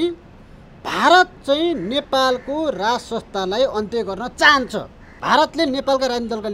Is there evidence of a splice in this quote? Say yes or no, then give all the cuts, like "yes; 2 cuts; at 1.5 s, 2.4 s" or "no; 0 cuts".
yes; 1 cut; at 5.2 s